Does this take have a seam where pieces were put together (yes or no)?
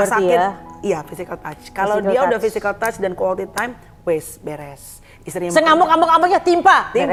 no